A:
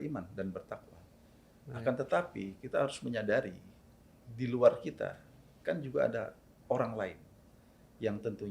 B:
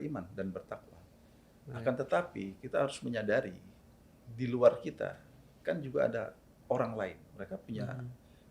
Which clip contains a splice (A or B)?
B